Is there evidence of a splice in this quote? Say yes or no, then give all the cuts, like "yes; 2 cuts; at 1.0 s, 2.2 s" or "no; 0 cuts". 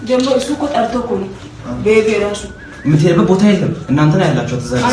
no; 0 cuts